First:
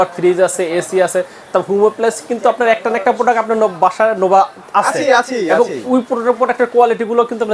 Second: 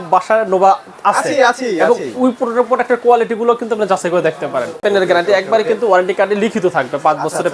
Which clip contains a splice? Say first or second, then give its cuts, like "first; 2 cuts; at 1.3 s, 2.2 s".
second; 1 cut; at 4.8 s